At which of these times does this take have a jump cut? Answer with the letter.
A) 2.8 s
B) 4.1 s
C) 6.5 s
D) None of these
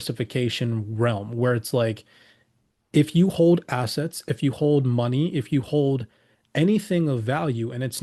D